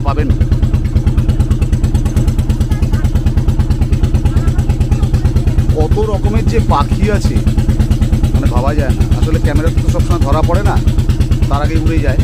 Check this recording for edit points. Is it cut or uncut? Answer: uncut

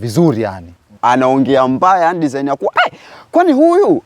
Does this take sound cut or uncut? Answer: cut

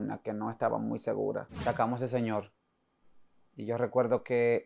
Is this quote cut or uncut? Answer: cut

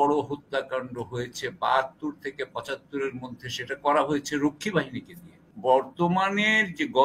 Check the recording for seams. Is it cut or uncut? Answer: cut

